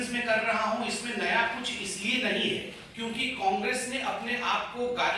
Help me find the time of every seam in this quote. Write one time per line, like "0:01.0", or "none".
0:02.8